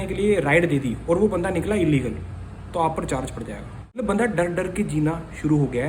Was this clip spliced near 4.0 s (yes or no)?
yes